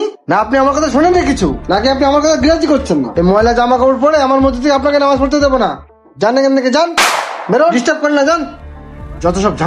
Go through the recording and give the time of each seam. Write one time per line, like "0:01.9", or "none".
none